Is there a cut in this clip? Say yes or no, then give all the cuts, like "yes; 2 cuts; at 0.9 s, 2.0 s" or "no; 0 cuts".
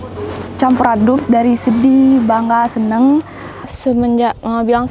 yes; 1 cut; at 3.7 s